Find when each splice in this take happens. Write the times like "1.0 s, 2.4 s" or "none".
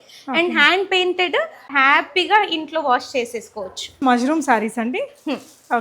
1.6 s, 3.9 s